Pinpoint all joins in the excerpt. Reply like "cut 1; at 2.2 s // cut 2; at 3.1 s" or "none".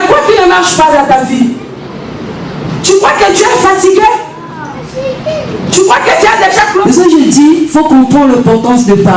cut 1; at 6.8 s